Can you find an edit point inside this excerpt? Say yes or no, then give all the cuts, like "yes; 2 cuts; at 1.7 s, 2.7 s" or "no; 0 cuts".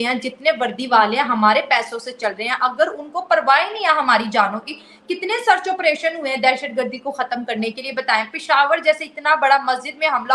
no; 0 cuts